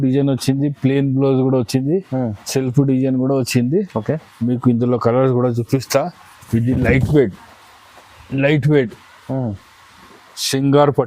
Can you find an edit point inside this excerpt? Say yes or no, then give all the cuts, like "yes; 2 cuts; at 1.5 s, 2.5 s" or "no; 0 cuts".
no; 0 cuts